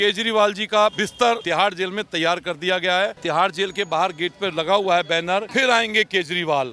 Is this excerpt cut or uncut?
cut